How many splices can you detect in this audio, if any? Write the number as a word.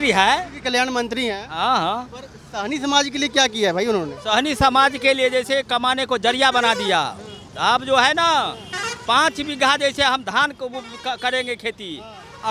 zero